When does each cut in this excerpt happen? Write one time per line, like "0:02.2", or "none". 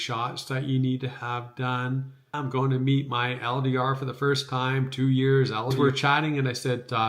0:02.4
0:05.7